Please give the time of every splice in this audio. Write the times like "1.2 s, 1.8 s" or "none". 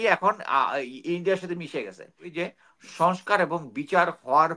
2.2 s

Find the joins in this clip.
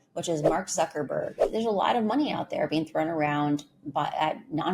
1.4 s

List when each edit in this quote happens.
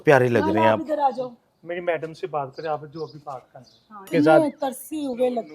4.1 s

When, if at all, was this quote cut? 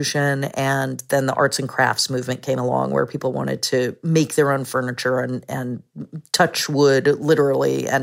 none

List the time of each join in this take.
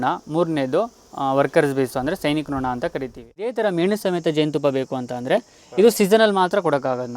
3.6 s

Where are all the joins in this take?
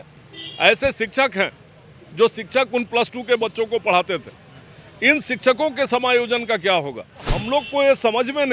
7.4 s

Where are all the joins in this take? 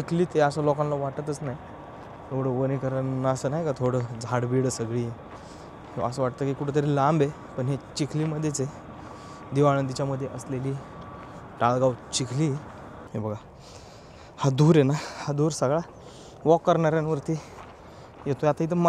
13.1 s

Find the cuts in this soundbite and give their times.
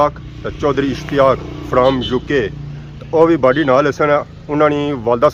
none

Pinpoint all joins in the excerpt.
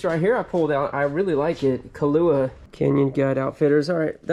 2.6 s

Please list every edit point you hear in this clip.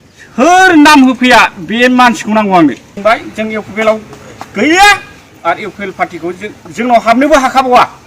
2.9 s

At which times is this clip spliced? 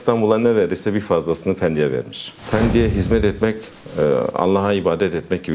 2.3 s

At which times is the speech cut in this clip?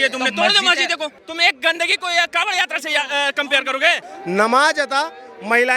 1.2 s, 4.1 s

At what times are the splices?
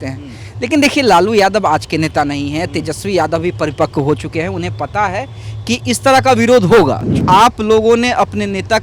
7.2 s

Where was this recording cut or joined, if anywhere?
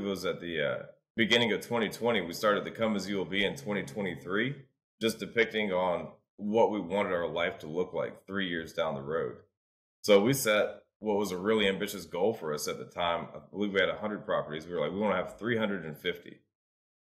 1.0 s

